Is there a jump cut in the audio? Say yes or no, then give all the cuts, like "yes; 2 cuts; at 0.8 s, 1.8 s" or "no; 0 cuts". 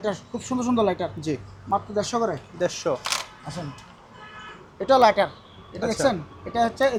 no; 0 cuts